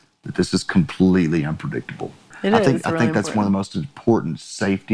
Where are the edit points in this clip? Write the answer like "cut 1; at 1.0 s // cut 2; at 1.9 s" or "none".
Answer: cut 1; at 2.4 s